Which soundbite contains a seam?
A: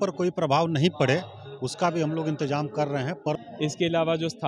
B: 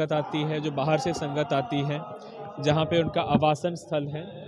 A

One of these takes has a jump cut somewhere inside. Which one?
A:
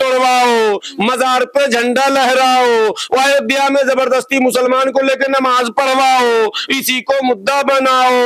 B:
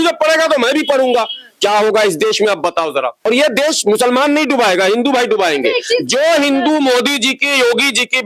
B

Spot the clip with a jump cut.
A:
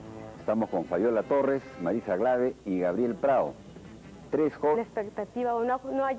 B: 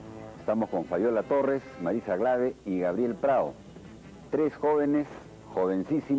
B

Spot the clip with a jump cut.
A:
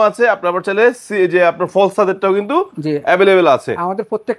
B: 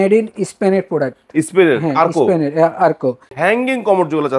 B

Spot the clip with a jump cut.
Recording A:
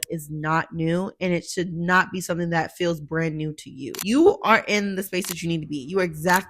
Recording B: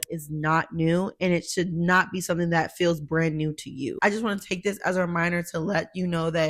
A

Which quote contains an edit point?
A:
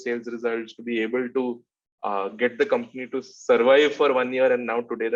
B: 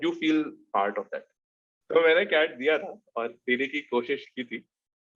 B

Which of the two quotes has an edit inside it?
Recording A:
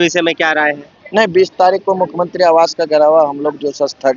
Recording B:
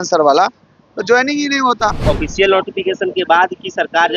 B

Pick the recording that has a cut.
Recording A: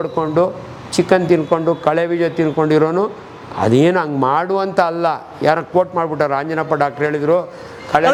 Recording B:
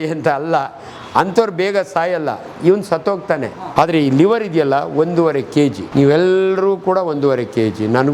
B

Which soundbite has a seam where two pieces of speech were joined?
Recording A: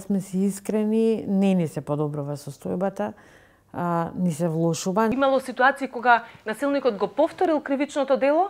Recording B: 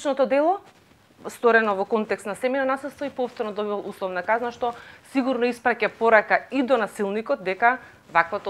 A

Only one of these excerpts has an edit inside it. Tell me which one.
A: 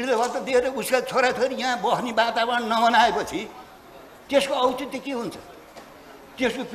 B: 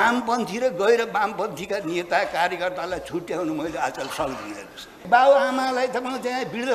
B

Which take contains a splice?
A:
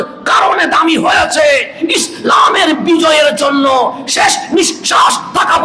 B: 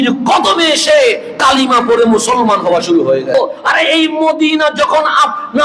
B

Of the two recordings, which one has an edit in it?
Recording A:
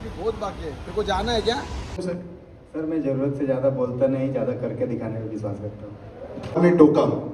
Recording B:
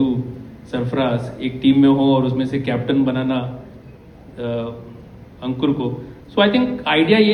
A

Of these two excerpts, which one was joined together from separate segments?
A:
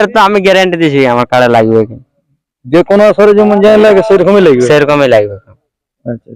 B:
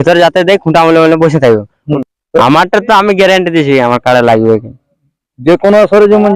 B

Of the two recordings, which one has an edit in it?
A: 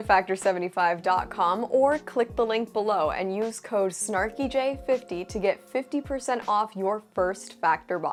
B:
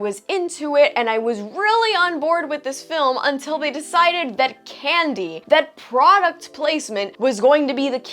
B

